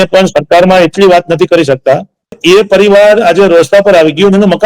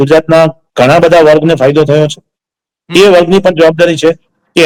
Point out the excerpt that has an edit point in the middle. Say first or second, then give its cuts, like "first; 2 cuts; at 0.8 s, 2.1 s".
first; 1 cut; at 2.4 s